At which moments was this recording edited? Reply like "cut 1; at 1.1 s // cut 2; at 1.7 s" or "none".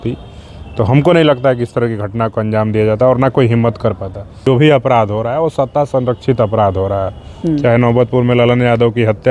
cut 1; at 4.4 s